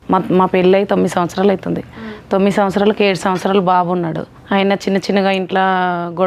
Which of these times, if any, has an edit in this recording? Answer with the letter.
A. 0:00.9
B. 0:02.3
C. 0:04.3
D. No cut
C